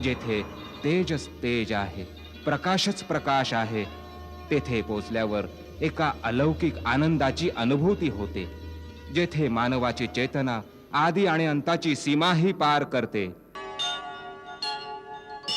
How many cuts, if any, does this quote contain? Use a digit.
1